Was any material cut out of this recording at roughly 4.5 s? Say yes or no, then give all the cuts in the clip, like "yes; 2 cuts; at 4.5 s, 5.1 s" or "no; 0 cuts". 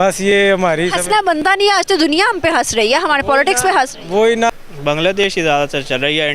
yes; 1 cut; at 4.5 s